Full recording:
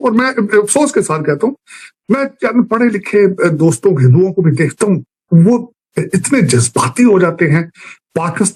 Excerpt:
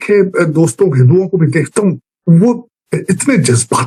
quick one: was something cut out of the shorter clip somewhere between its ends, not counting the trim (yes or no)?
no